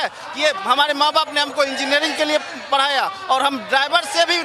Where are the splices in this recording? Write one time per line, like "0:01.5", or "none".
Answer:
none

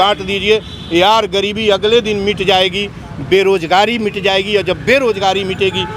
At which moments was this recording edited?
none

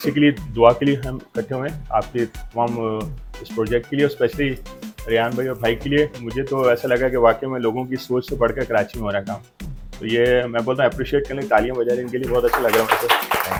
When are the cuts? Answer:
none

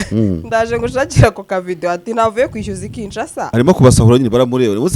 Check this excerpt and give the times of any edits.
0:03.5

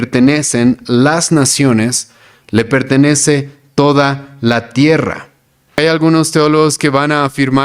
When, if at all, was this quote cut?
0:05.7

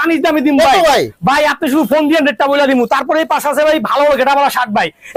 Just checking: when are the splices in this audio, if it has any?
none

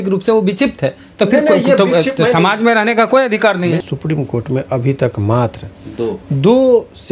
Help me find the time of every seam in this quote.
0:03.8

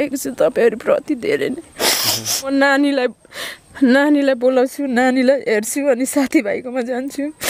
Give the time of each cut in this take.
0:02.5

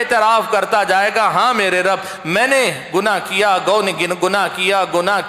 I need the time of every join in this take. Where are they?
none

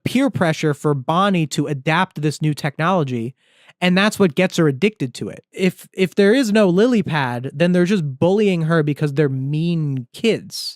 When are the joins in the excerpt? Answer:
0:05.5

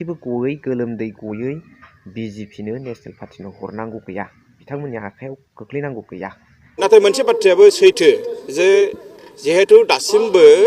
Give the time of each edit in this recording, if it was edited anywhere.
0:06.8

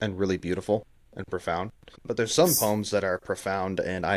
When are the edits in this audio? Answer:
0:02.0

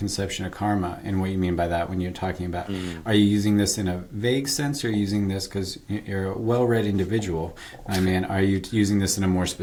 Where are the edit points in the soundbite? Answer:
none

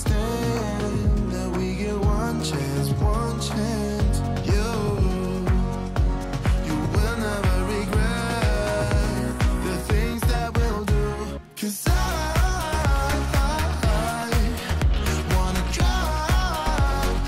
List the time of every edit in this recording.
none

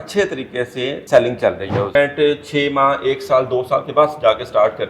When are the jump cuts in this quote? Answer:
0:01.0
0:01.9

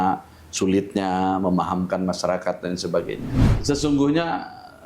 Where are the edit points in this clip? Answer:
0:03.5

